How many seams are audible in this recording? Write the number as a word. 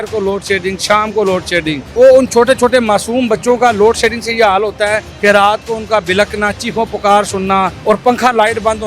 three